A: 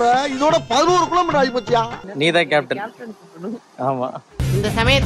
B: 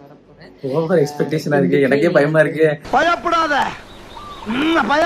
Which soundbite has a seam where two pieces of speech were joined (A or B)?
A